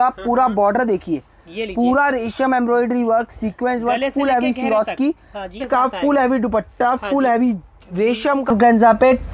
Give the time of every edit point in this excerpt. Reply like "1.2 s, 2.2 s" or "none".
5.6 s, 8.5 s

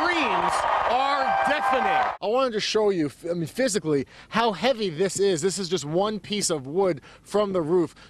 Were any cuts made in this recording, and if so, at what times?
2.1 s

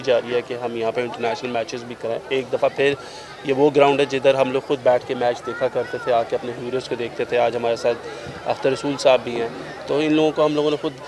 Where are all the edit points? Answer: none

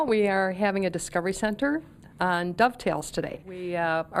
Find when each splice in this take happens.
none

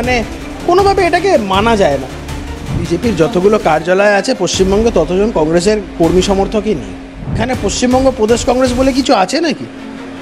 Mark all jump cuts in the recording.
2.6 s, 7.4 s

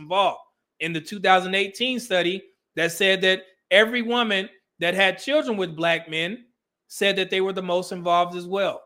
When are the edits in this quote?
none

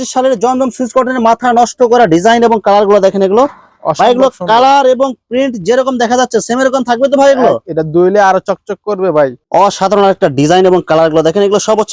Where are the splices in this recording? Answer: 9.4 s

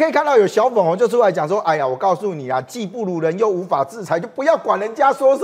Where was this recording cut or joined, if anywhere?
none

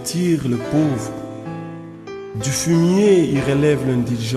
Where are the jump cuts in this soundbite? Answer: none

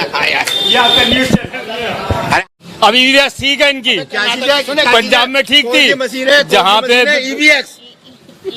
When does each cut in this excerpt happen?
2.4 s

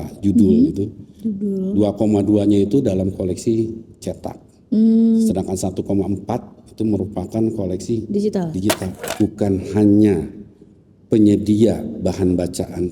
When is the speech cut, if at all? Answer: 8.9 s

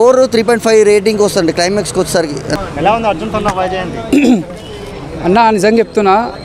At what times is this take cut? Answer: none

